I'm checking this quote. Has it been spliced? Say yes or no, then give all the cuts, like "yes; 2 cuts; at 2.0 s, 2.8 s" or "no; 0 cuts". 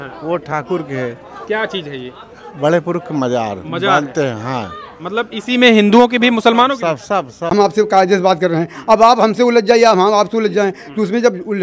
yes; 1 cut; at 7.4 s